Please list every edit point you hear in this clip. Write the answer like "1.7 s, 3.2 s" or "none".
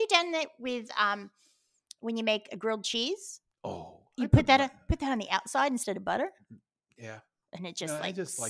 none